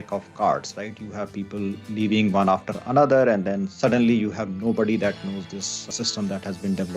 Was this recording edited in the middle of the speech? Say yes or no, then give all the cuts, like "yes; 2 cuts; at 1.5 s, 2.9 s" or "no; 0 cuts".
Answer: yes; 1 cut; at 5.9 s